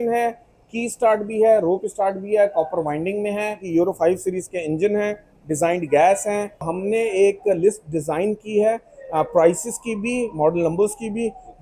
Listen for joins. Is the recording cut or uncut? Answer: cut